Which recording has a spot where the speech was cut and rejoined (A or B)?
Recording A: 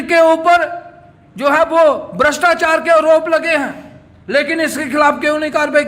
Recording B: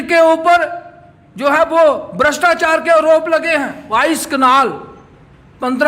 B